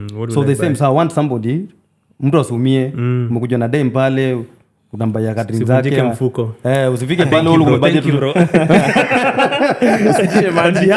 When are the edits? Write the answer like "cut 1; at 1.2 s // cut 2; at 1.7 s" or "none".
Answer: none